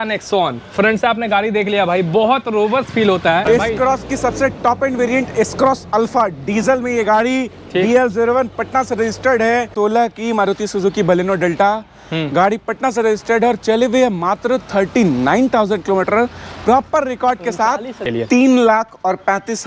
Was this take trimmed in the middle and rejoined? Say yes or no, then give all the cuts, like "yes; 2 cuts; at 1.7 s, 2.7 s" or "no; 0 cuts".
yes; 3 cuts; at 3.5 s, 9.7 s, 18.0 s